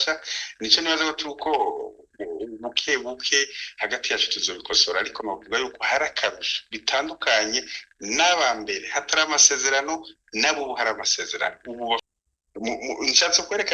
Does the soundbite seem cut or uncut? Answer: cut